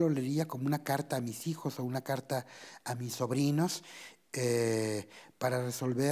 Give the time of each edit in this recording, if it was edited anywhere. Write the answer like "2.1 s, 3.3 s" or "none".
none